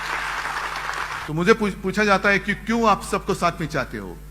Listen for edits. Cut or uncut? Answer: cut